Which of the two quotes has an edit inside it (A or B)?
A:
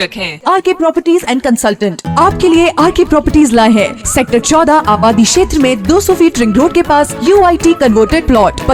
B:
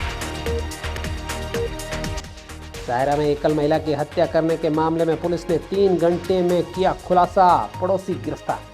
B